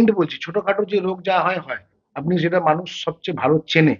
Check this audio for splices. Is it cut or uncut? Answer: uncut